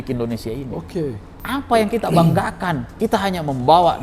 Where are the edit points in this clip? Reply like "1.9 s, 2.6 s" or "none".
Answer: 1.3 s, 2.8 s